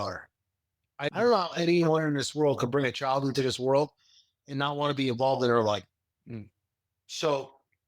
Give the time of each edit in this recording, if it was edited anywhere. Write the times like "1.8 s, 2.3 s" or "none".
0.9 s